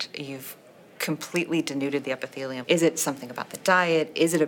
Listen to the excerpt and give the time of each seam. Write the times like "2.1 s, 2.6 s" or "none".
2.6 s